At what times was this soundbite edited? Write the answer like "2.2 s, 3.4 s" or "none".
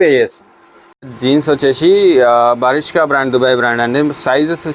1.1 s